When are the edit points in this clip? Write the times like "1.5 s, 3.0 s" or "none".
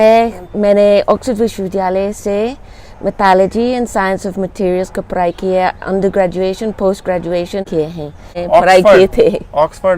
8.0 s

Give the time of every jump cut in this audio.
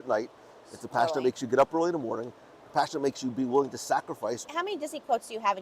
4.4 s

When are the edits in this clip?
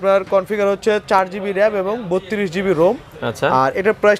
none

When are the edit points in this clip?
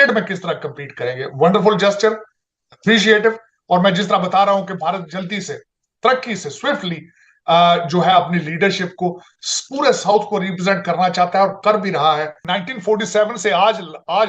12.4 s

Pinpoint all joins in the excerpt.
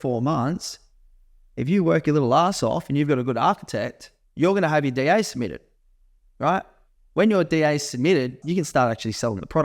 8.4 s

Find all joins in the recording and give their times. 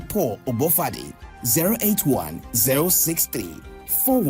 2.5 s

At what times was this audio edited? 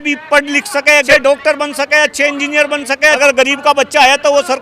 1.1 s, 3.2 s

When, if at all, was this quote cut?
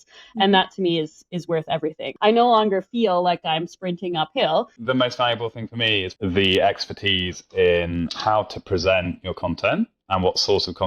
2.1 s, 4.8 s, 6.1 s

